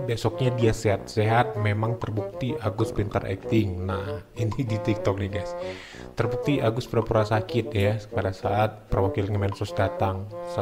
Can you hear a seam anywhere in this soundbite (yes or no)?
no